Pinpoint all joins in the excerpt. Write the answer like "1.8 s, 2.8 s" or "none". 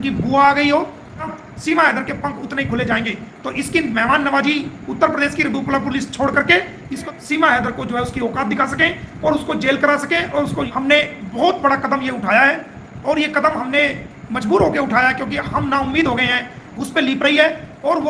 1.3 s, 7.1 s, 10.7 s, 16.8 s